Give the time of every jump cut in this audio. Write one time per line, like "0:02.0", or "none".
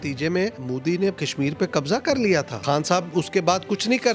0:00.9
0:02.6